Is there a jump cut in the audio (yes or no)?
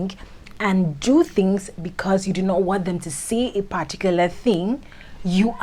no